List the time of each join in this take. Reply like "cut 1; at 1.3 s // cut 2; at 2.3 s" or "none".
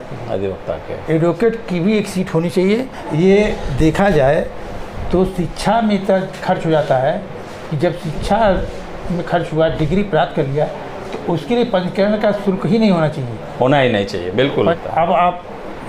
cut 1; at 3.0 s // cut 2; at 14.8 s